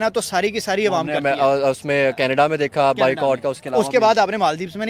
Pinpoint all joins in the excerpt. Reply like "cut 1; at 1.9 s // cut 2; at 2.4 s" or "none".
none